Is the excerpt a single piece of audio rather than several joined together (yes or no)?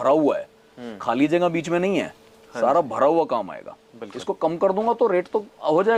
yes